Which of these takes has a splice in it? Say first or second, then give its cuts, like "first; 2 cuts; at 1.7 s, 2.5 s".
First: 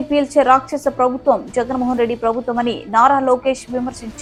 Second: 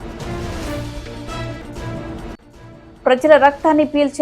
second; 1 cut; at 2.1 s